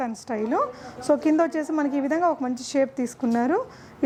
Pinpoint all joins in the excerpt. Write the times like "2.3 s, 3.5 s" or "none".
none